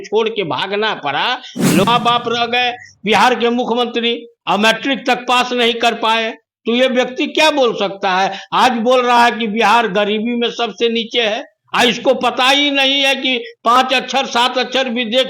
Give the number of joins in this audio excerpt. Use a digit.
1